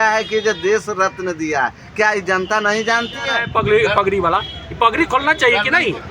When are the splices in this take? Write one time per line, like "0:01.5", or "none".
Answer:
0:03.4